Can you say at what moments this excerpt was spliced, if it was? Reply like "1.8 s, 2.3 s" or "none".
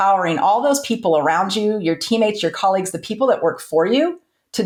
none